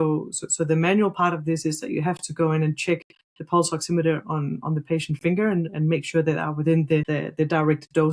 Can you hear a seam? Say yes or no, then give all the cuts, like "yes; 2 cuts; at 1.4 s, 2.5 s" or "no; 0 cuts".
yes; 1 cut; at 7.1 s